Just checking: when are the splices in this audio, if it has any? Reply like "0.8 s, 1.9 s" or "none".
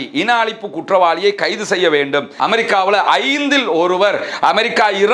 2.4 s